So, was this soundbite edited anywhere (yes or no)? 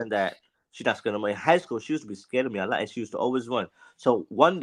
no